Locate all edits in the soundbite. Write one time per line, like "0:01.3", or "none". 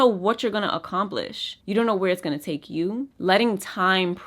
0:03.1